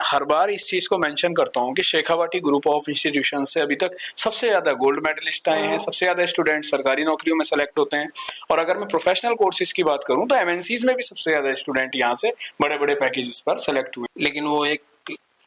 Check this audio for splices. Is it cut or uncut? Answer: cut